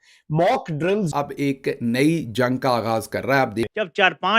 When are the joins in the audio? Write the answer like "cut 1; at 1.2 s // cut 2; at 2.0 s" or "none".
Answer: cut 1; at 1.1 s